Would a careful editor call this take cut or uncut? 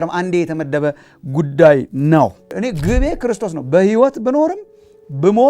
cut